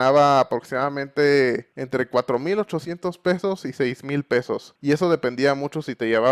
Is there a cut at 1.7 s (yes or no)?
yes